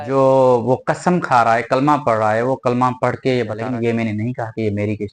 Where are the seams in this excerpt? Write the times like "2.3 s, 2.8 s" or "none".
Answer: 3.6 s